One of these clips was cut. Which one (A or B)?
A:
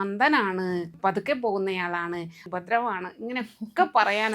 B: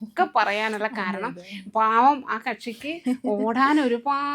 A